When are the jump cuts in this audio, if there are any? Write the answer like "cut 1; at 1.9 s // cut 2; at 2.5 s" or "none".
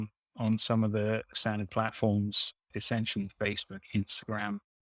cut 1; at 1.4 s // cut 2; at 2.7 s